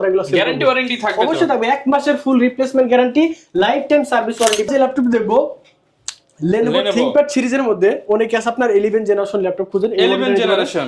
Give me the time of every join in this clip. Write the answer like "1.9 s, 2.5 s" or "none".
4.7 s